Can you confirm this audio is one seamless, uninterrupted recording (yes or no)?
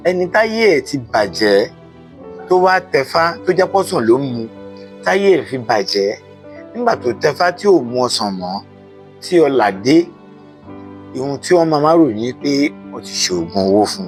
yes